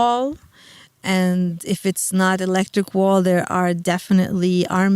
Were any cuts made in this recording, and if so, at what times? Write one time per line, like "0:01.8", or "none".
0:01.0